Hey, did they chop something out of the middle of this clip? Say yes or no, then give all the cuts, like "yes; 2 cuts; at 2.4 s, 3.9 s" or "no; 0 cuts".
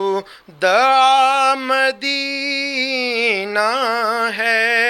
no; 0 cuts